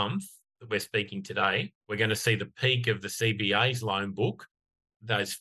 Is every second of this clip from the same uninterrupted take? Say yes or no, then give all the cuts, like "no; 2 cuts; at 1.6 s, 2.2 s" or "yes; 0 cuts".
no; 1 cut; at 1.8 s